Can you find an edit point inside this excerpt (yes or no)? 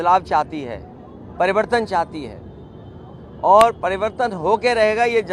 no